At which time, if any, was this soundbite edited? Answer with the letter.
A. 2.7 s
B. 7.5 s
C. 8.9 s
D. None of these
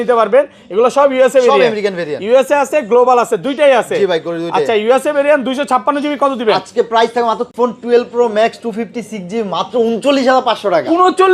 B